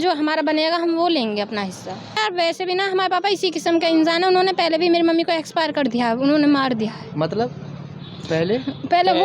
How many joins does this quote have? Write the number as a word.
one